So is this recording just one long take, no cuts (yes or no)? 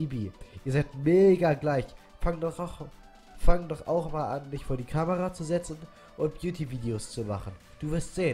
yes